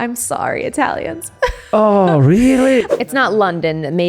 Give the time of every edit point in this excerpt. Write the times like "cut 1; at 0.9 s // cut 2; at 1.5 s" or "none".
cut 1; at 3.0 s